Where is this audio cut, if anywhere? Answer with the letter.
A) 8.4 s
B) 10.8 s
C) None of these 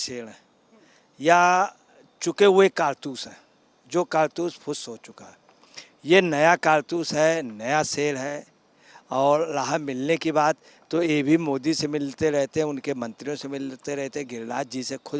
C